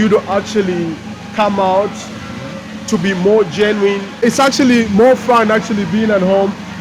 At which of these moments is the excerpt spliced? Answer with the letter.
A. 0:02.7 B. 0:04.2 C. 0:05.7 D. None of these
B